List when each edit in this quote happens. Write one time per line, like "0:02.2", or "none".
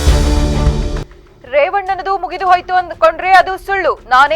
0:01.1